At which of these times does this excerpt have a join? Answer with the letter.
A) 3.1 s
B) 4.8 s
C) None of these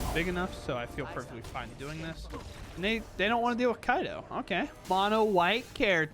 B